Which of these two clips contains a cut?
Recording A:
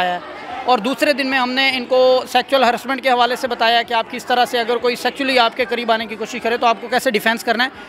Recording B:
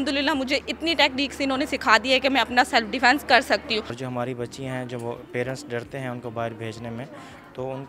B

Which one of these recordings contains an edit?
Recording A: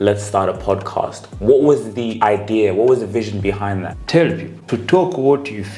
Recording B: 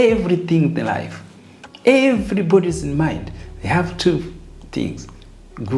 A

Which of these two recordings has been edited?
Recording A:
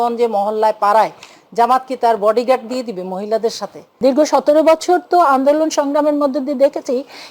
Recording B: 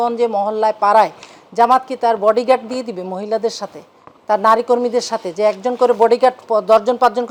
A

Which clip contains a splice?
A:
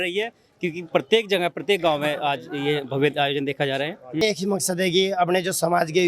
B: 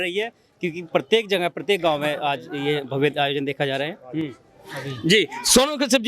A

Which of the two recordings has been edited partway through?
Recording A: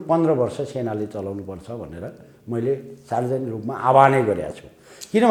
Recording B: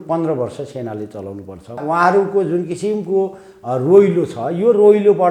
B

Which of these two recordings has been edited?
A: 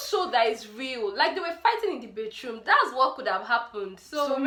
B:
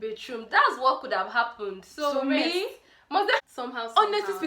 B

